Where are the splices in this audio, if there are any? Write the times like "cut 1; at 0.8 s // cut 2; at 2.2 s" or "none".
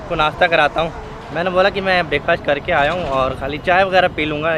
none